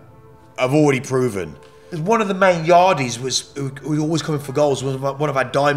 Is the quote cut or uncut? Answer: cut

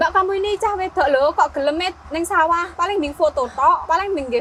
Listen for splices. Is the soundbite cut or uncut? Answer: uncut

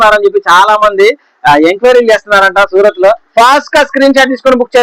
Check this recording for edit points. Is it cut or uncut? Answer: cut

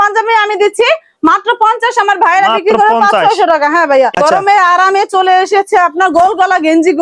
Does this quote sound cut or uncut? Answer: cut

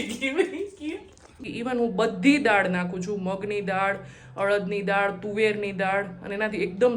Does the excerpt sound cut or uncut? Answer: cut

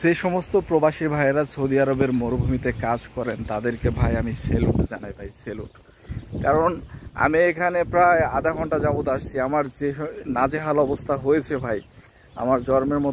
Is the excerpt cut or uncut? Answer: uncut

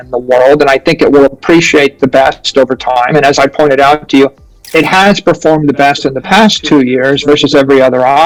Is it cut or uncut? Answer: uncut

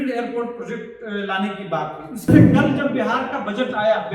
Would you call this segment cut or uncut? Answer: cut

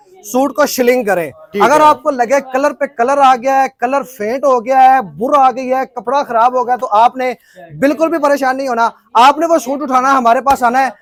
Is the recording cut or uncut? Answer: uncut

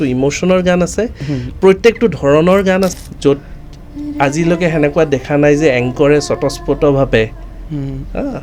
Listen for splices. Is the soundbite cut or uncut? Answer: cut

